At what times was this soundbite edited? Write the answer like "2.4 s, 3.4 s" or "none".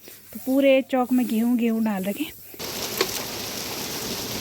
2.6 s